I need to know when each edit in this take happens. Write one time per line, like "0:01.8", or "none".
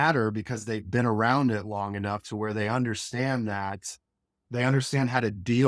none

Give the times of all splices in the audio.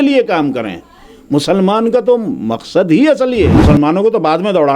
0:03.6

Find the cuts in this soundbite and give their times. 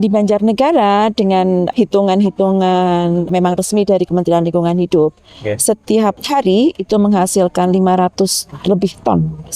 0:01.7
0:03.3
0:06.2

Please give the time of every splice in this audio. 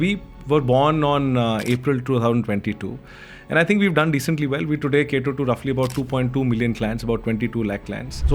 none

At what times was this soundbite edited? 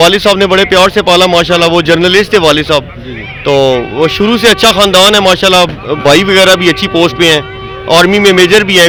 none

